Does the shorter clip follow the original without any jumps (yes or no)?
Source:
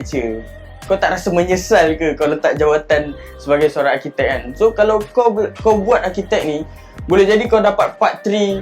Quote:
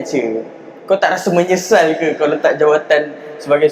yes